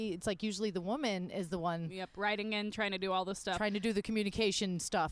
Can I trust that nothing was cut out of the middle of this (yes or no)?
yes